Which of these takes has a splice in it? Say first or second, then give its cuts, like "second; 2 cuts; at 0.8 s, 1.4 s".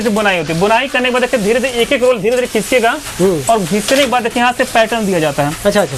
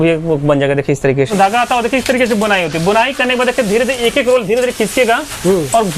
second; 1 cut; at 1.3 s